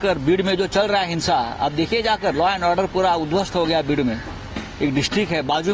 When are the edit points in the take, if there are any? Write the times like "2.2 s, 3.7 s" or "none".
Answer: none